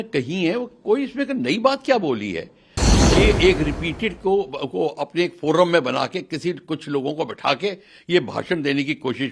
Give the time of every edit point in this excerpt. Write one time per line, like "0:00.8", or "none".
0:02.8